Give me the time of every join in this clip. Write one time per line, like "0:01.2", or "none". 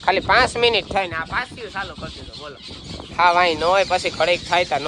0:02.8